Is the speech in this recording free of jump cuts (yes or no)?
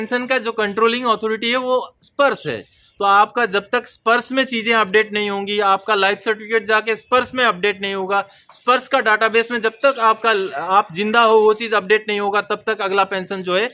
yes